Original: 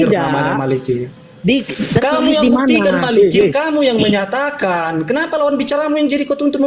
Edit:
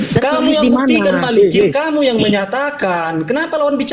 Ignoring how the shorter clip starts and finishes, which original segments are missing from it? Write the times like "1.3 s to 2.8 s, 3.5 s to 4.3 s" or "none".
none